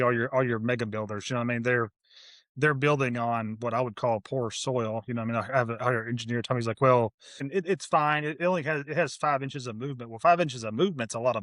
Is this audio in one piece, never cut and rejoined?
no; 1 cut; at 7.5 s

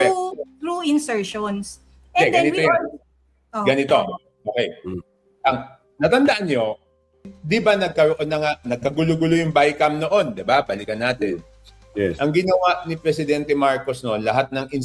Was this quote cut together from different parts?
yes; 1 cut; at 7.3 s

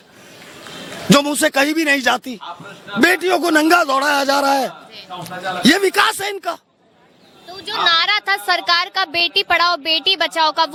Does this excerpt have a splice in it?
no; 0 cuts

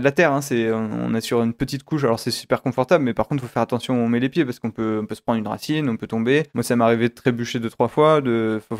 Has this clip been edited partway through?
yes; 1 cut; at 6.5 s

